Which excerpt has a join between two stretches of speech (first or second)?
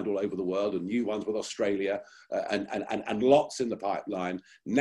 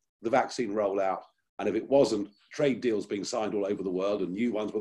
second